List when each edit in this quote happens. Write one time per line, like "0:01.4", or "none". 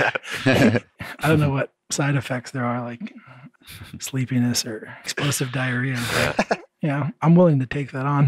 0:01.0
0:03.5
0:05.2
0:06.7